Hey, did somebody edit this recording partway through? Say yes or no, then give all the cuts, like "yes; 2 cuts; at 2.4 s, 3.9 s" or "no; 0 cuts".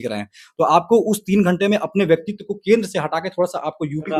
no; 0 cuts